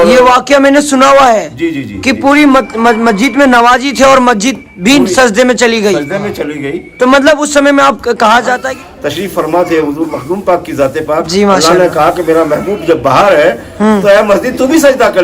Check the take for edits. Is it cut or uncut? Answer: cut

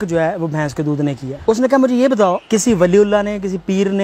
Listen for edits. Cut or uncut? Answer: cut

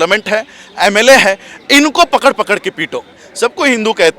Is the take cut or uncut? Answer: cut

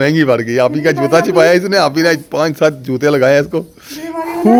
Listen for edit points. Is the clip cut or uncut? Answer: uncut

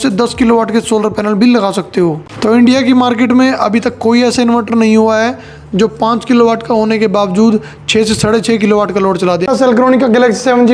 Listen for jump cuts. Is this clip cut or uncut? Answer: cut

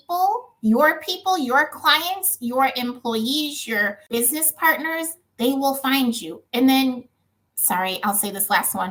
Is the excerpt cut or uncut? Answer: uncut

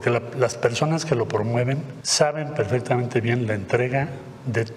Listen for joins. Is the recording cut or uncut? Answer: cut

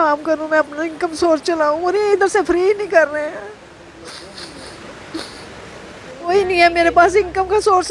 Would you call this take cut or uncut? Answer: cut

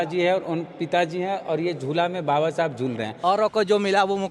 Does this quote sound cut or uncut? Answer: cut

